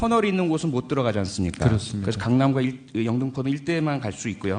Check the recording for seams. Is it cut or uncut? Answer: cut